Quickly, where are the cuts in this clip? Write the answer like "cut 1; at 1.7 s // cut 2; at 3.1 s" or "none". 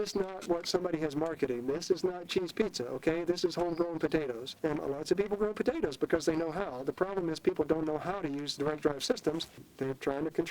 cut 1; at 4.5 s // cut 2; at 8.5 s // cut 3; at 9.6 s